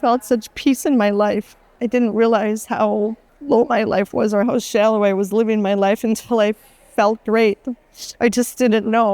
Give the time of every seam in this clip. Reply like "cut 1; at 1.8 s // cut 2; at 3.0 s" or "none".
cut 1; at 1.7 s // cut 2; at 3.3 s